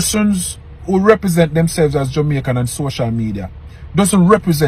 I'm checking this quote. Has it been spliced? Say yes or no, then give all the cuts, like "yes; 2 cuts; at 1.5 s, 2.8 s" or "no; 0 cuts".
no; 0 cuts